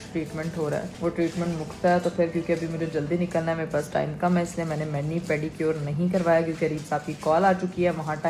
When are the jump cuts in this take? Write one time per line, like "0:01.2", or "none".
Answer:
none